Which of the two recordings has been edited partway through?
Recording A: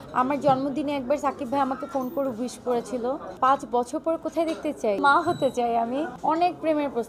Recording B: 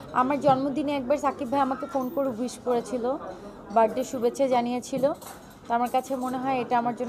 A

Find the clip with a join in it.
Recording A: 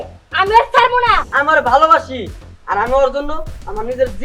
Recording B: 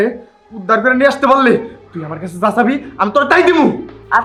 A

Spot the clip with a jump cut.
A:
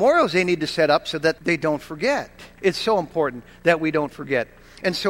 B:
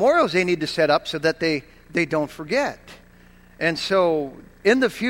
A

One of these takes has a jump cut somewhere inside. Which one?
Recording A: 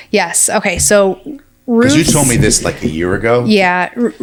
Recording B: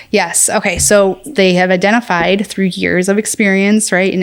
B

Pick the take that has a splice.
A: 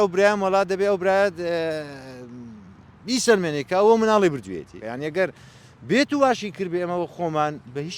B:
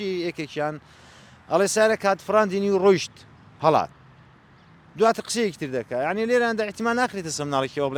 A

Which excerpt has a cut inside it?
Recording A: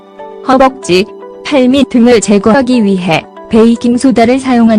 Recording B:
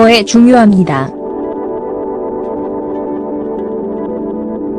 A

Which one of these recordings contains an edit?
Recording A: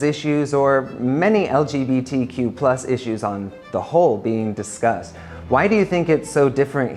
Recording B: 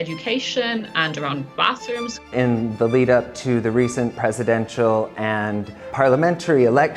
B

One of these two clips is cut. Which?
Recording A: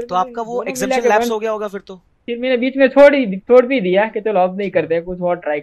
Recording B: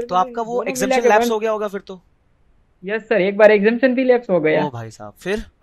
A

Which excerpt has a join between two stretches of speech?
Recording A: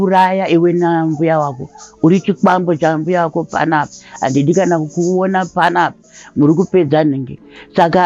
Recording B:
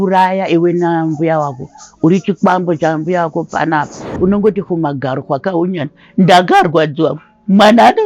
B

